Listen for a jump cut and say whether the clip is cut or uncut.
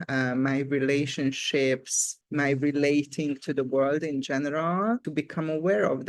uncut